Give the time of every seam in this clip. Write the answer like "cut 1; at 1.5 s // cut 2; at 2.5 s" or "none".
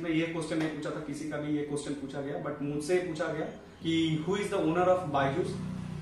none